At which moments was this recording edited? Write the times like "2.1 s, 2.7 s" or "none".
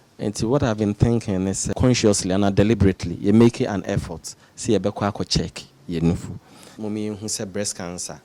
1.7 s, 6.6 s